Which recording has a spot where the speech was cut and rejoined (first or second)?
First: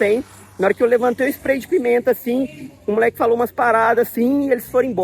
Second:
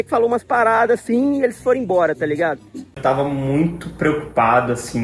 second